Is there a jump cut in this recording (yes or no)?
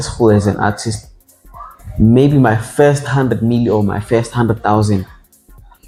no